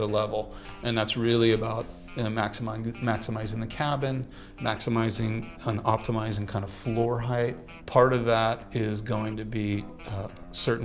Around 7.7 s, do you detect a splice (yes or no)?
yes